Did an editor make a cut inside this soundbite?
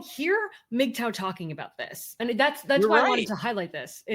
no; 0 cuts

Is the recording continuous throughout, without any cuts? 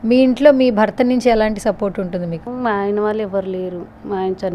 no; 1 cut; at 2.4 s

